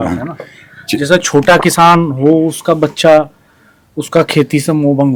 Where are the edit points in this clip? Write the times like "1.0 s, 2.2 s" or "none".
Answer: none